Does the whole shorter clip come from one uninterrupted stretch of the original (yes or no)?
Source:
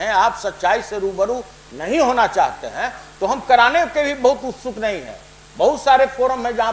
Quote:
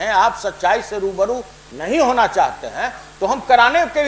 yes